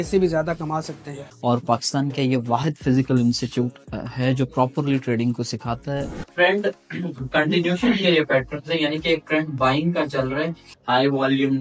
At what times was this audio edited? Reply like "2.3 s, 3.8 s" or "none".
1.3 s, 6.2 s, 10.7 s